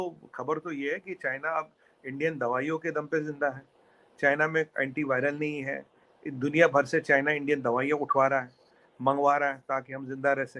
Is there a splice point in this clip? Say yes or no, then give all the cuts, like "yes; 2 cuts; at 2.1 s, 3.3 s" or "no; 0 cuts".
no; 0 cuts